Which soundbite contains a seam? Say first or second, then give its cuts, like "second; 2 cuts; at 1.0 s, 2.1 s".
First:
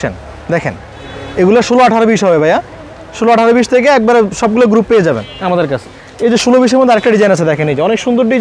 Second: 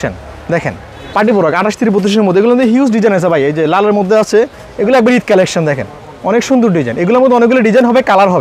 second; 2 cuts; at 0.9 s, 4.6 s